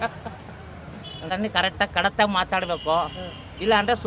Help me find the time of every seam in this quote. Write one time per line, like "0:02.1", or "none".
0:01.3